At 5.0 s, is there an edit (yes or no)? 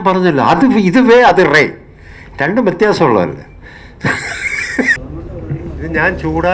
yes